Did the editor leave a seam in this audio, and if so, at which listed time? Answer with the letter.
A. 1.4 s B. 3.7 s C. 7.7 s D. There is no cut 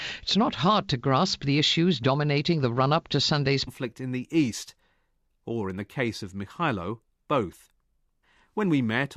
D